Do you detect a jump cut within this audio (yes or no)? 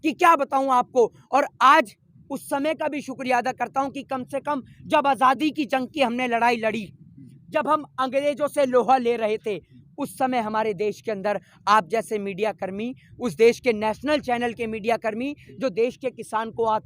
no